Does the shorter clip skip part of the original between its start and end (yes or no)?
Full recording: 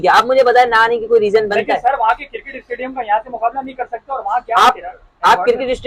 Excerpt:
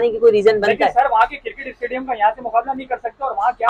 no